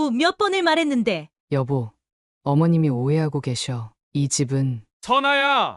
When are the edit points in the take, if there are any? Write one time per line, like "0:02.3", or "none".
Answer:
0:01.3
0:04.9